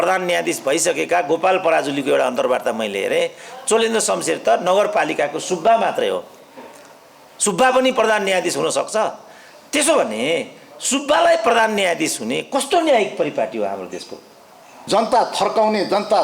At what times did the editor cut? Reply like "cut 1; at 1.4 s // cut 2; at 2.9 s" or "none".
cut 1; at 14.8 s